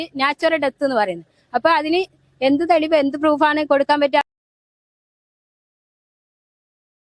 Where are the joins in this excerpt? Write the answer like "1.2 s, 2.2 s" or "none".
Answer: none